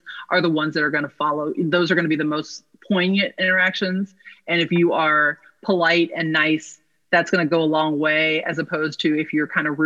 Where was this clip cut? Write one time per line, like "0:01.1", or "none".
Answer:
none